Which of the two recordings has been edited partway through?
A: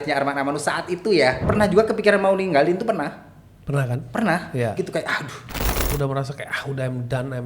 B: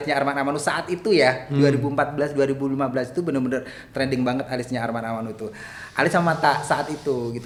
A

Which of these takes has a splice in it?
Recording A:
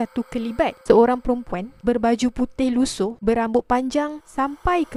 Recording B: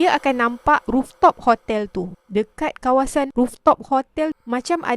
B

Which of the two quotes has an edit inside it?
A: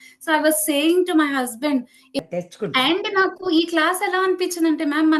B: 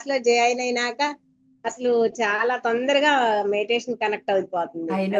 A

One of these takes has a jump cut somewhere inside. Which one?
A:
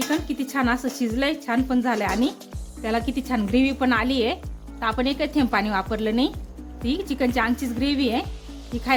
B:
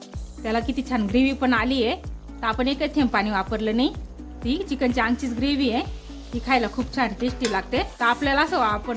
B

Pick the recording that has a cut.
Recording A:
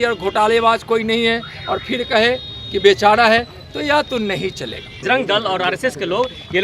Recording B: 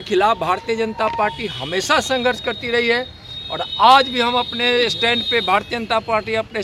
A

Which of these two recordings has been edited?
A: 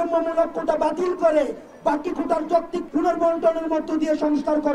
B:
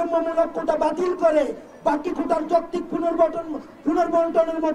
A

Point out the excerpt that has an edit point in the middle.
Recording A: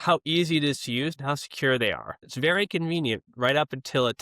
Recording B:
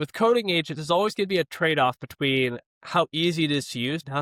A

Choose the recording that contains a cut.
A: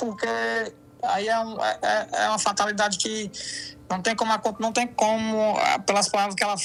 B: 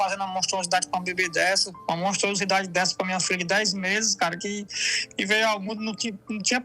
B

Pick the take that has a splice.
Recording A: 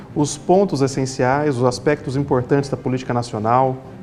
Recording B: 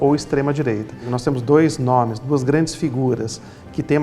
B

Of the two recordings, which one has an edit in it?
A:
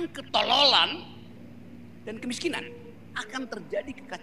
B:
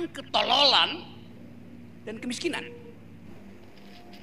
A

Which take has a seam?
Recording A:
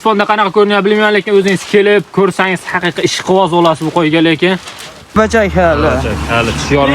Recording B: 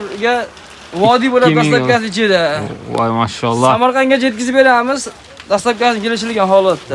A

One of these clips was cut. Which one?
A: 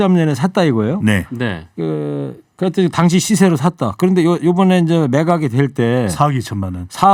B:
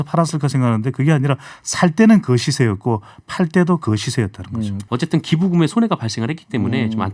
B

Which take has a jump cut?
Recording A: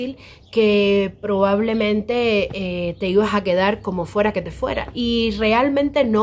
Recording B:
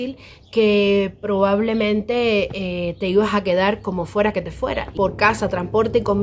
B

